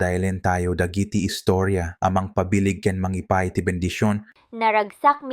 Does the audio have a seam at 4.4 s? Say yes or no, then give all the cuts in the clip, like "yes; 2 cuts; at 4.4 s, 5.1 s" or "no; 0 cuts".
yes; 1 cut; at 4.4 s